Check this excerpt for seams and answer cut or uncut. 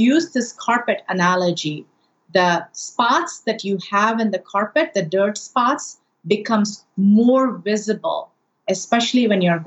cut